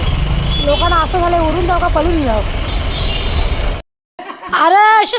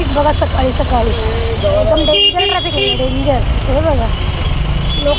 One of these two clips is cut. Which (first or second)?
first